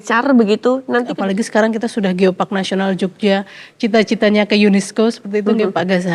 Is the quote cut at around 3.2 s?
no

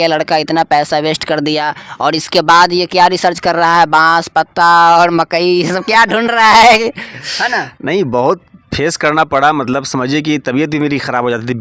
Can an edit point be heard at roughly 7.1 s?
no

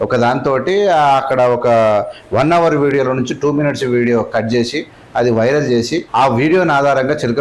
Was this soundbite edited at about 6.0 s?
yes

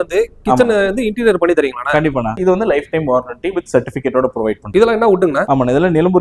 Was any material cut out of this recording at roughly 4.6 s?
yes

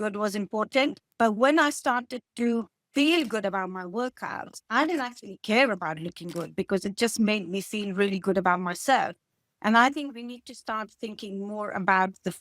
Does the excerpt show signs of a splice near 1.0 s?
yes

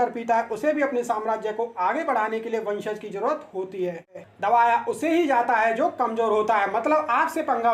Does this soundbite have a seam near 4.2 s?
yes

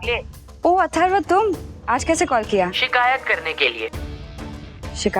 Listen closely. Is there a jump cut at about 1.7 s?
yes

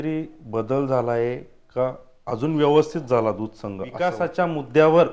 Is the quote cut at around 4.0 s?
yes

